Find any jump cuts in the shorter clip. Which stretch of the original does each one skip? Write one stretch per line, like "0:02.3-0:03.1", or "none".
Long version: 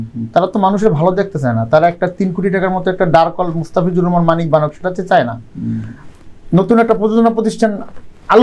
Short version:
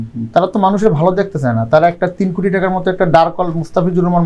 none

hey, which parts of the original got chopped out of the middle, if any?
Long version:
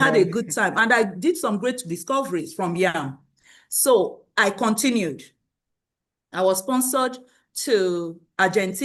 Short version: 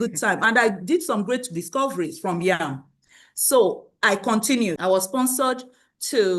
0:05.1-0:06.3

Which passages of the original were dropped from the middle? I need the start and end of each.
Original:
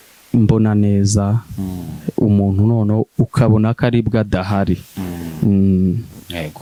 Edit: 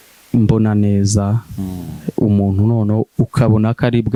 none

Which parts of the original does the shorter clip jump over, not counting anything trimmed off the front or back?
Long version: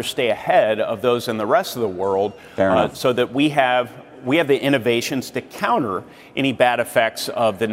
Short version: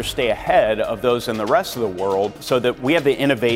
0:02.5-0:03.9

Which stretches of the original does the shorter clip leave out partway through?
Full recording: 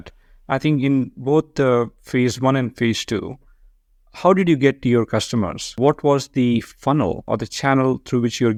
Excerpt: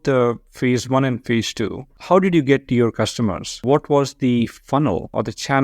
0:03.4-0:04.0

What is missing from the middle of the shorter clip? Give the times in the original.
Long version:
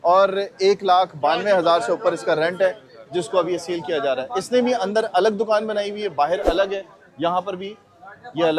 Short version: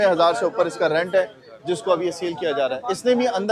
none

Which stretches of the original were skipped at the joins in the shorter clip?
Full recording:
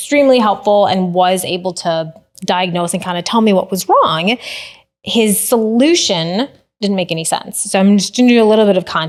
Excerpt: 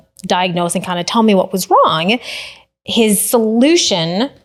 none

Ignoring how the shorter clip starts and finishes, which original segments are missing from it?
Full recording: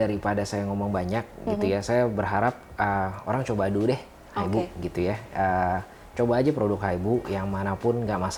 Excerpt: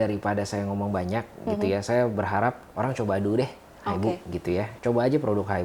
0:02.7-0:03.2
0:05.2-0:06.1

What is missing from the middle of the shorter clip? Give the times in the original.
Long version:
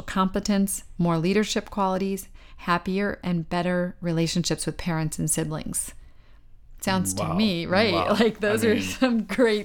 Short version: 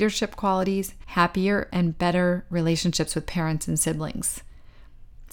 0:02.3-0:02.5

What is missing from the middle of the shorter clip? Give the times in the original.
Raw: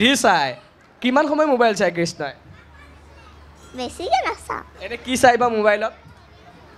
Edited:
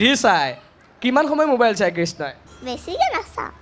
0:02.5-0:03.6

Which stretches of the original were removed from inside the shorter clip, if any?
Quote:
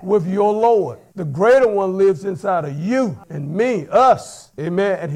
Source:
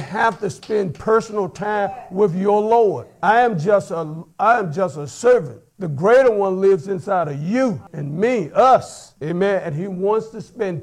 0:03.1-0:05.6

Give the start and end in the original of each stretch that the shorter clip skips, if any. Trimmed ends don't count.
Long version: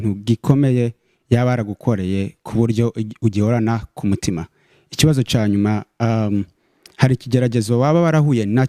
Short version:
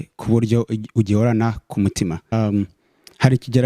0:04.6-0:06.1

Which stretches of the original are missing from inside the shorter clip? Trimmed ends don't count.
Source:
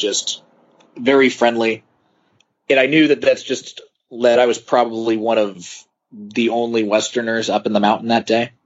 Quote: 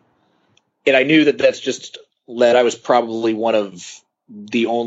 none

